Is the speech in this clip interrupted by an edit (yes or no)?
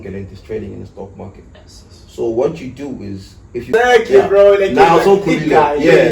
yes